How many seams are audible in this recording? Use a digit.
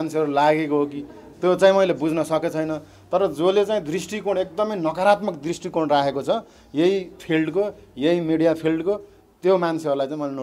0